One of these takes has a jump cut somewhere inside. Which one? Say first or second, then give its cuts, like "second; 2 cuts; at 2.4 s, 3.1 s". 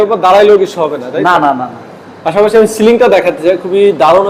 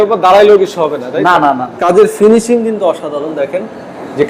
second; 1 cut; at 1.8 s